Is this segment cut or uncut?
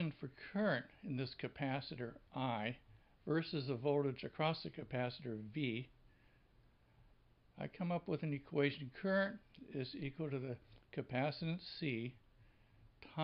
uncut